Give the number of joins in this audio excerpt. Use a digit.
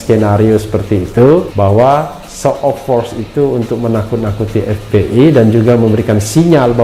1